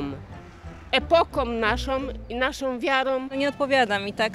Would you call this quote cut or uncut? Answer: cut